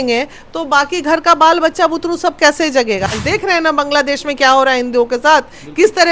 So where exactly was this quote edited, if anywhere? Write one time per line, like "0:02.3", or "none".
0:03.1